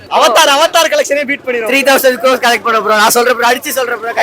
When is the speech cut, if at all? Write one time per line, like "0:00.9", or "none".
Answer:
none